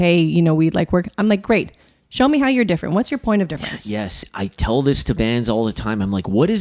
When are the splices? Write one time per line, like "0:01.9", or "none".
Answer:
0:04.2